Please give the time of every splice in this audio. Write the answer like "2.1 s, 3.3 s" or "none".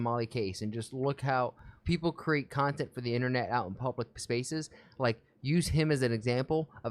1.7 s